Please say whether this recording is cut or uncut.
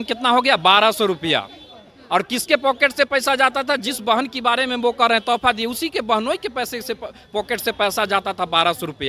uncut